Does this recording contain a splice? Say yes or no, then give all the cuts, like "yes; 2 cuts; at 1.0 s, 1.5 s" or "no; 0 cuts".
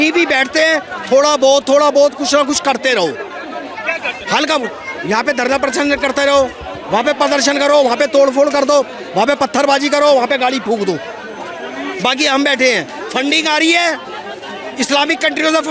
no; 0 cuts